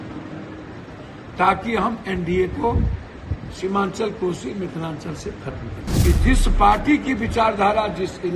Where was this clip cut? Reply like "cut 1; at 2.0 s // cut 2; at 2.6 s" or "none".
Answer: cut 1; at 5.9 s